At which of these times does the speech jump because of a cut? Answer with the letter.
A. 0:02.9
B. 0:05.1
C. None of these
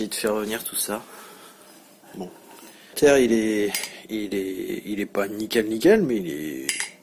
A